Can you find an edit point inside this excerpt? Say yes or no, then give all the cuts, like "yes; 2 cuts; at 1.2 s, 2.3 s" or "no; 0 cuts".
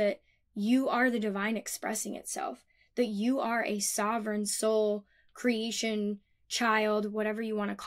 no; 0 cuts